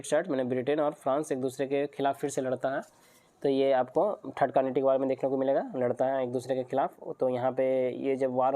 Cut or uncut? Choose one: uncut